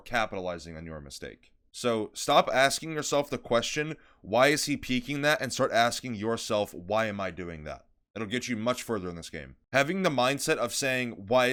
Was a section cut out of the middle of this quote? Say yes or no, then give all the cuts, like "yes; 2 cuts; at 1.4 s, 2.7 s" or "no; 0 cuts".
no; 0 cuts